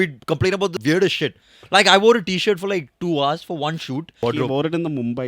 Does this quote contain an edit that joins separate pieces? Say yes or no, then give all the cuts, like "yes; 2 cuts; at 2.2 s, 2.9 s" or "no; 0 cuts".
yes; 2 cuts; at 0.7 s, 4.2 s